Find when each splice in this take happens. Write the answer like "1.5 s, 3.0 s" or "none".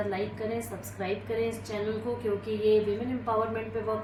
none